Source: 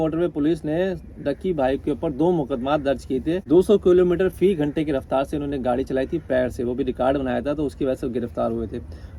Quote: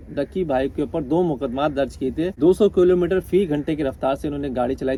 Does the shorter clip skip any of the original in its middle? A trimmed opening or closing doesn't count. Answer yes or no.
no